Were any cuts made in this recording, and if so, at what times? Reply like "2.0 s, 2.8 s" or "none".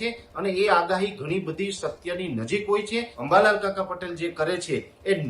3.1 s